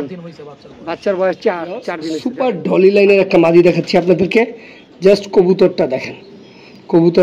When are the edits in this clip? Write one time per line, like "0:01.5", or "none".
0:02.3